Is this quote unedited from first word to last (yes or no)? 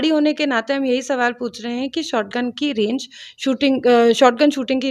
yes